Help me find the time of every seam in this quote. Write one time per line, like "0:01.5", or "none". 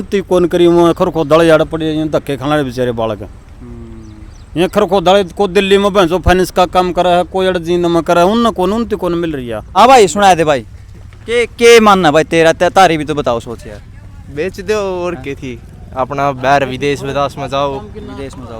0:09.6